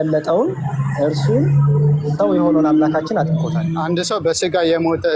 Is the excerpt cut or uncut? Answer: cut